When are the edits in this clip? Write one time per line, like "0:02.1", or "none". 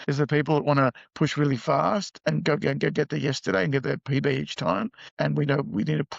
none